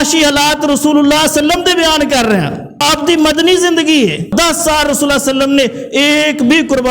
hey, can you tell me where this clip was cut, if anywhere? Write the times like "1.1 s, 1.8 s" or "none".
2.8 s, 4.3 s